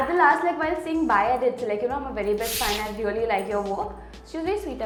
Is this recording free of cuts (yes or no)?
yes